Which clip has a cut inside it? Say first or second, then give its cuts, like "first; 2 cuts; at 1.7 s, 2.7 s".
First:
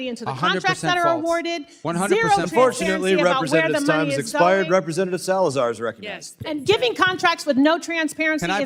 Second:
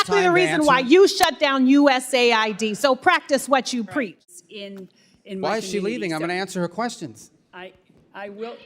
second; 1 cut; at 4.2 s